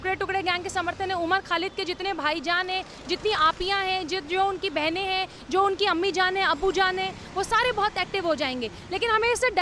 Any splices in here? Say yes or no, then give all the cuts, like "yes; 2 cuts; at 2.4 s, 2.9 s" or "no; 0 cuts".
no; 0 cuts